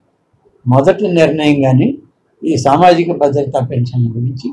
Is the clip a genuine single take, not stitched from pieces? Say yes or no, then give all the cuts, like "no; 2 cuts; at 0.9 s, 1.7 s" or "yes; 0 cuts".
yes; 0 cuts